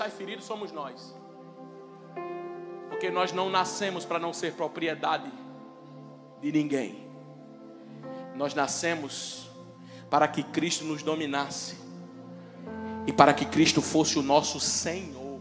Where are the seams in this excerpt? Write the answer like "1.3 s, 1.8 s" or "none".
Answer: none